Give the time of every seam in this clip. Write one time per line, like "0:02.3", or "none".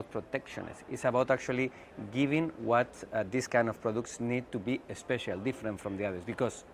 none